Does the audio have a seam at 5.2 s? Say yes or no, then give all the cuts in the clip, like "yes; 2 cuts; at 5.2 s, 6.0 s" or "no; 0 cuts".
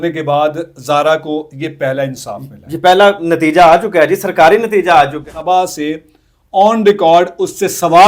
yes; 1 cut; at 5.2 s